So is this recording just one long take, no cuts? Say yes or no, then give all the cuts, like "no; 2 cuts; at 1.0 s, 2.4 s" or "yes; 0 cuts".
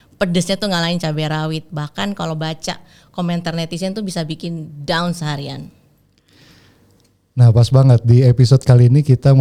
yes; 0 cuts